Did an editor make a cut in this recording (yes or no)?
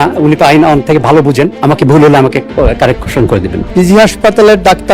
yes